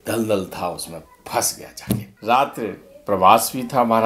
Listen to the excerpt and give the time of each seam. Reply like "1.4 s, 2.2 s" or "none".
2.1 s

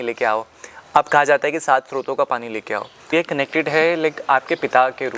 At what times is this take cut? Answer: 3.1 s

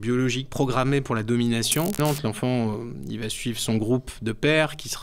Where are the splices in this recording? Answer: 2.0 s

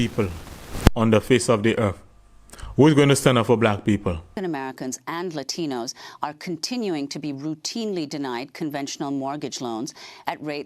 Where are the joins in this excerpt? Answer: 4.3 s

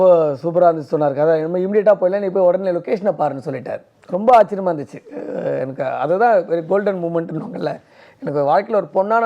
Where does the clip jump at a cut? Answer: none

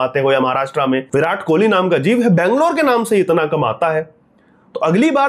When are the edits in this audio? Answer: 1.0 s

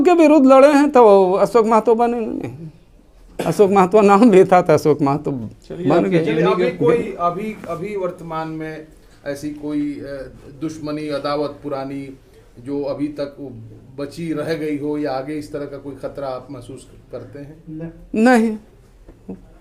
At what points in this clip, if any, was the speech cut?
none

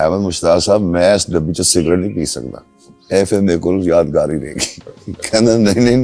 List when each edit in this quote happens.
none

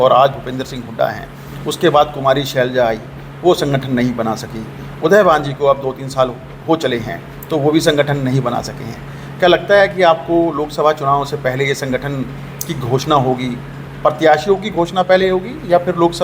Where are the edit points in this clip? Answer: none

